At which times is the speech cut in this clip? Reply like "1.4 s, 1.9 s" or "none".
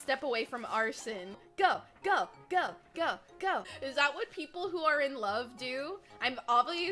1.4 s, 3.7 s

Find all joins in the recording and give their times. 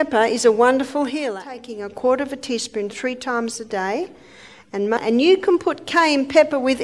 1.4 s, 5.0 s

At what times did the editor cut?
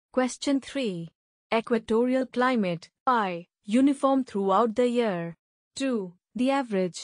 3.2 s

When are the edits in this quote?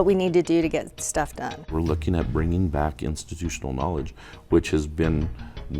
1.7 s

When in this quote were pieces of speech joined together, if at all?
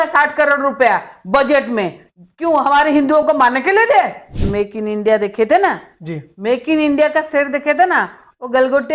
4.5 s

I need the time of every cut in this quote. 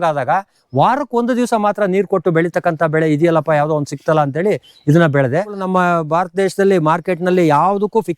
5.6 s

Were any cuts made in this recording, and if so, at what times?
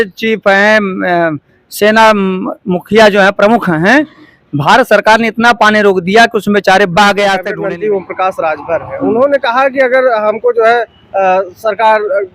7.5 s

